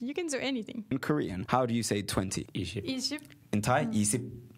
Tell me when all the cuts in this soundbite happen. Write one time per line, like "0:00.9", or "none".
0:01.0
0:02.4